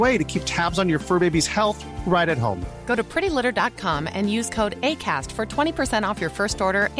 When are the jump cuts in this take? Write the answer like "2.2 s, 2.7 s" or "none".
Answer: none